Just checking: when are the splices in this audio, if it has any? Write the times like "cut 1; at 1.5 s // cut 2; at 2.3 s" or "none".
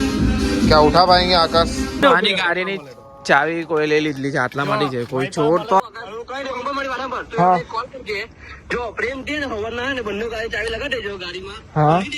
cut 1; at 2.0 s // cut 2; at 5.8 s